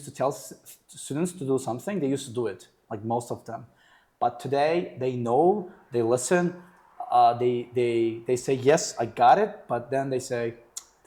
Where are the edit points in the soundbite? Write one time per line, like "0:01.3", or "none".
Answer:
none